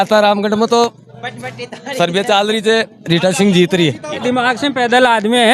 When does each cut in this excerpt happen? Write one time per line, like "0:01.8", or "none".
0:04.2

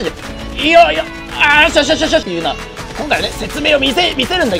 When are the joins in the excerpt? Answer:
0:02.2

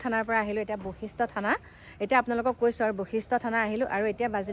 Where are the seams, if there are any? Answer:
none

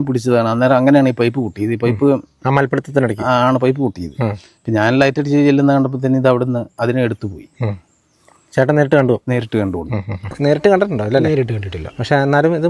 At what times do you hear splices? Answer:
0:10.3

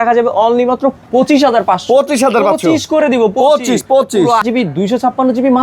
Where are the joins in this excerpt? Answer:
0:04.4

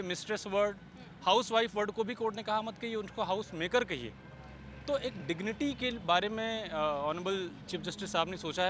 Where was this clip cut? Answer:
none

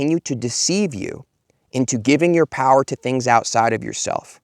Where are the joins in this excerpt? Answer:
none

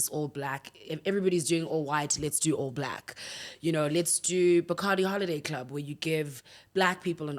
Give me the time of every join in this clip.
none

